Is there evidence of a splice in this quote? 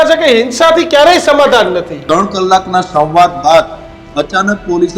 yes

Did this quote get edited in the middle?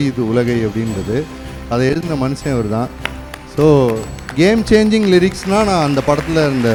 no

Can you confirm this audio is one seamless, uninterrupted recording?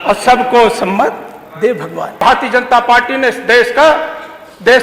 no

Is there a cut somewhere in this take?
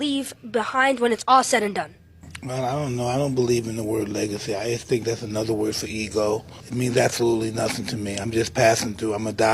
yes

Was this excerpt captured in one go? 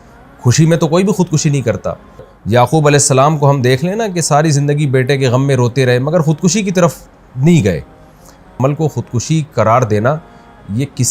no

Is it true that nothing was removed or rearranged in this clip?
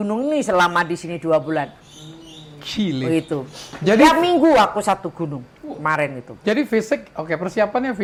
yes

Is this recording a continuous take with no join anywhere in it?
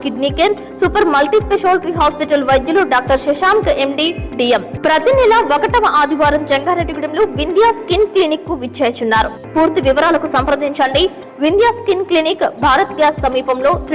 no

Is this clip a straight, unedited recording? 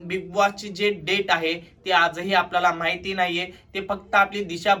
yes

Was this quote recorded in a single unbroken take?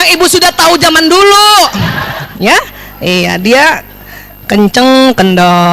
no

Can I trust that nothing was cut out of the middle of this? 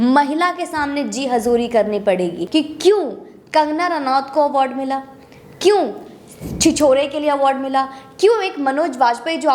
no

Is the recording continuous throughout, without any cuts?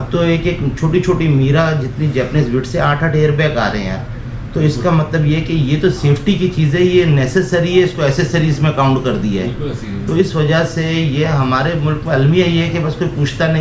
yes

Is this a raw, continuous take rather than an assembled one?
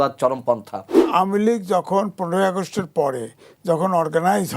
no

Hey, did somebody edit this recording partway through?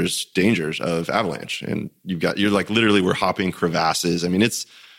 no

